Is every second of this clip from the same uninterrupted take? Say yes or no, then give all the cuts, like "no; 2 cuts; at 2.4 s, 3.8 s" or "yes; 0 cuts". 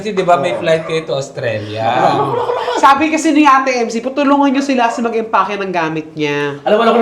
yes; 0 cuts